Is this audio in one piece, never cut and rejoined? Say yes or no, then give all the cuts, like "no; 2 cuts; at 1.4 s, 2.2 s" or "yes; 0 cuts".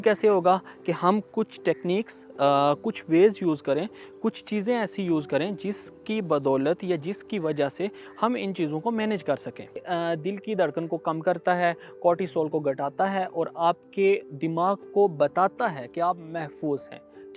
no; 1 cut; at 9.8 s